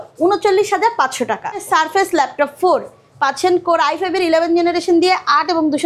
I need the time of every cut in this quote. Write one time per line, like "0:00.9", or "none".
0:01.7